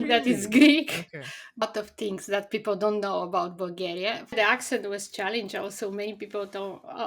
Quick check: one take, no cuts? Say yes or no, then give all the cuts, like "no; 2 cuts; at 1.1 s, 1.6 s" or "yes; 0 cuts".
no; 2 cuts; at 1.6 s, 4.3 s